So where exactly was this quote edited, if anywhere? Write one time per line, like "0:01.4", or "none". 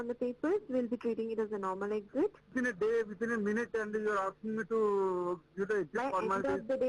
0:02.5